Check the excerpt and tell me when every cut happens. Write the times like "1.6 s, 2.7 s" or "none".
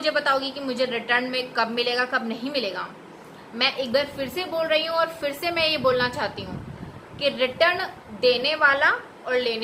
none